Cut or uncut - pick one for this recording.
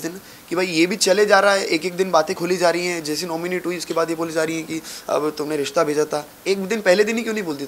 uncut